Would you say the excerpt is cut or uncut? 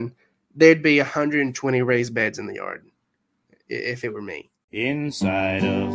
cut